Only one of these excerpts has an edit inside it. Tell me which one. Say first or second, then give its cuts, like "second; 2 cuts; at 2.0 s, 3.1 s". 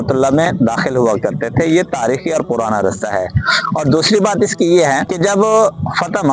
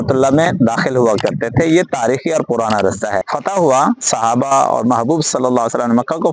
second; 1 cut; at 3.3 s